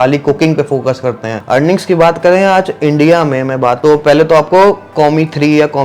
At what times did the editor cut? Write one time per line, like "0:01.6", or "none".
0:01.3
0:03.8